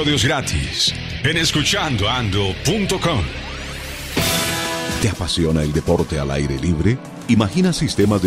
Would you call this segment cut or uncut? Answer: cut